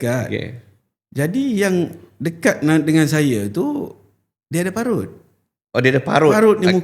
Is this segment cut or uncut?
uncut